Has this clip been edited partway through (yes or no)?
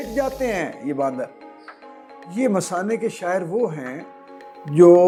no